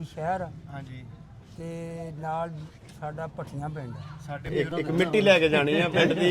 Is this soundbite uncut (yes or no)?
no